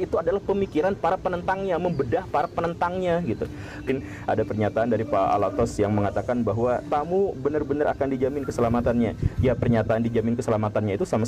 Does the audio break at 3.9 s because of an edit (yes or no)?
yes